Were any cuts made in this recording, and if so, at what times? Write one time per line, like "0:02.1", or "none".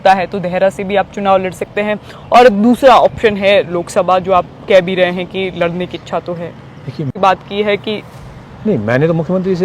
0:07.2